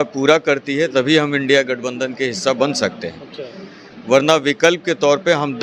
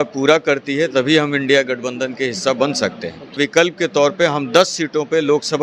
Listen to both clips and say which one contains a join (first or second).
second